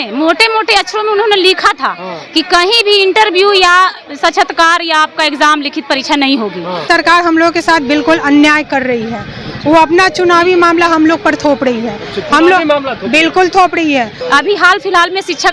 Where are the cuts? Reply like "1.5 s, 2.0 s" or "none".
6.8 s, 14.2 s